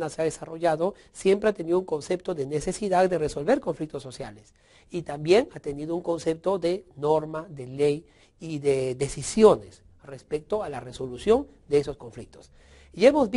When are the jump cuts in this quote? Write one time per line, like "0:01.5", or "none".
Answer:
0:11.7